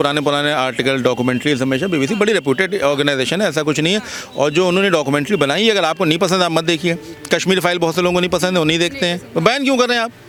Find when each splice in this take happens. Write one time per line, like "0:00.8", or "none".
none